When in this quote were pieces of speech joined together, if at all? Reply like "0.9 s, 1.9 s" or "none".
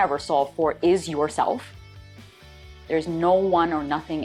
none